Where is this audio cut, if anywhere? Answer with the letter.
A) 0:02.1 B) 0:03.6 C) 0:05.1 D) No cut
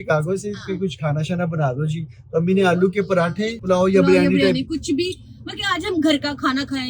B